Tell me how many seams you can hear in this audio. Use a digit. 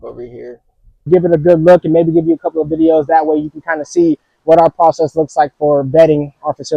1